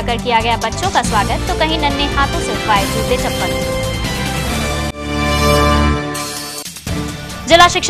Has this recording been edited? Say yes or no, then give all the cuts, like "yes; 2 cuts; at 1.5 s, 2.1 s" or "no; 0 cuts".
no; 0 cuts